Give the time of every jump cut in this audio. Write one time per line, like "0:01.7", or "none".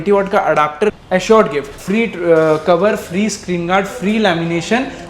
0:01.0
0:01.7